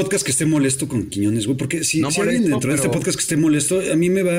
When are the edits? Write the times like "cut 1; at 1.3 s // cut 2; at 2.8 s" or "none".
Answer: none